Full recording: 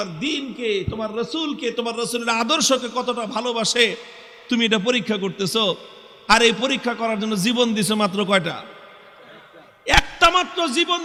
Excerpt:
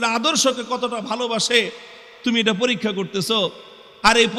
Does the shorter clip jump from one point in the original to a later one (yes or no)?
no